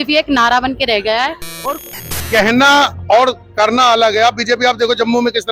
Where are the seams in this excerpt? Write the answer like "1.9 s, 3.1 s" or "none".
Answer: 1.7 s